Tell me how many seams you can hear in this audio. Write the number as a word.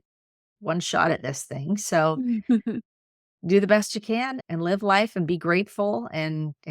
one